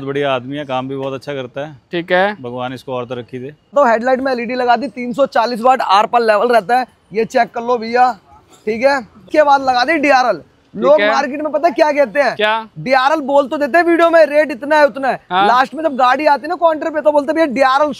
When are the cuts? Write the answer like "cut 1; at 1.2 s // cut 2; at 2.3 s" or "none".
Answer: cut 1; at 3.7 s // cut 2; at 9.2 s